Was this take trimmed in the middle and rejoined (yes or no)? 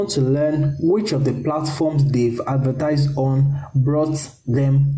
no